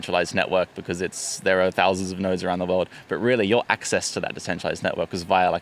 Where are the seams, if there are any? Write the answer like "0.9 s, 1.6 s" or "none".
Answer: none